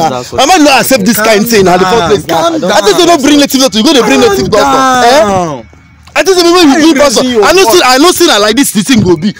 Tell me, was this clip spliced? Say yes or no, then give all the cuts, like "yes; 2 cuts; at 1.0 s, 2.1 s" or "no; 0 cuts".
no; 0 cuts